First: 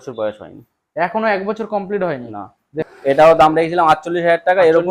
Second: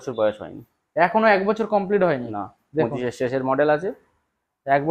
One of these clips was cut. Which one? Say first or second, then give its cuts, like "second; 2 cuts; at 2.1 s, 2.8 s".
first; 1 cut; at 2.9 s